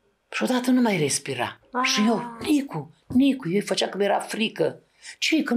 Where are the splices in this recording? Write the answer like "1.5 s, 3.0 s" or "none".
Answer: none